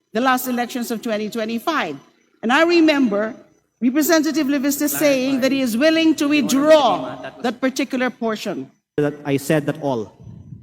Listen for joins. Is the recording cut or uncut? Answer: cut